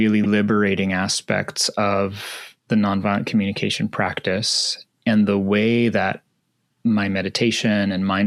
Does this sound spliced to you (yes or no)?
no